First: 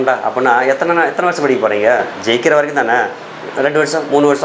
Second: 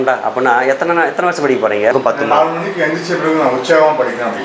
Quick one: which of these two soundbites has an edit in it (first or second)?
second